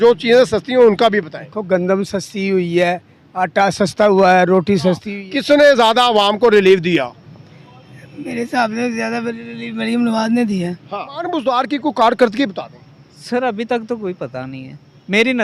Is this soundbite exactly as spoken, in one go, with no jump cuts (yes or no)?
no